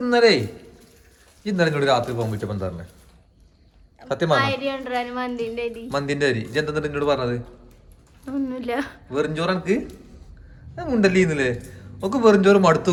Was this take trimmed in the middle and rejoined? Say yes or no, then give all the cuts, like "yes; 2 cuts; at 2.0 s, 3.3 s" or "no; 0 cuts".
no; 0 cuts